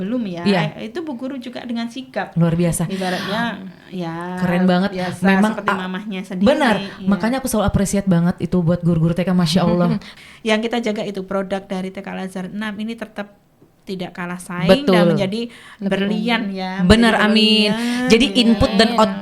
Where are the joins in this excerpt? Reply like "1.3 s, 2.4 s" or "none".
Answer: 10.1 s